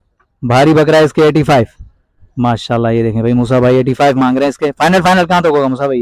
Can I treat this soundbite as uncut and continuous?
yes; 0 cuts

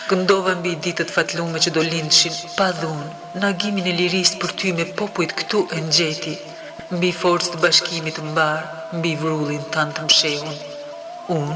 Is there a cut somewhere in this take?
no; 0 cuts

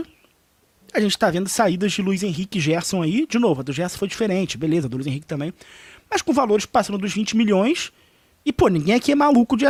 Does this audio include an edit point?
no; 0 cuts

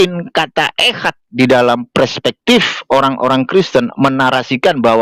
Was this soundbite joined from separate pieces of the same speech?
no; 0 cuts

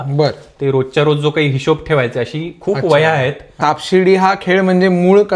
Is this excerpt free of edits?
no; 1 cut; at 3.5 s

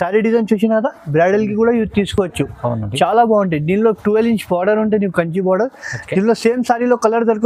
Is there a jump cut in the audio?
no; 0 cuts

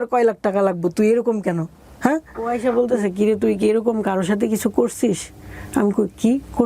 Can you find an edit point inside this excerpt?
yes; 1 cut; at 2.5 s

